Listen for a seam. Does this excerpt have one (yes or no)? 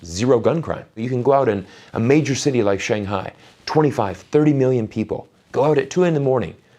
yes